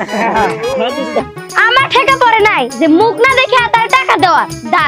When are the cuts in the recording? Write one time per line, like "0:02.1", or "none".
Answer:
0:01.2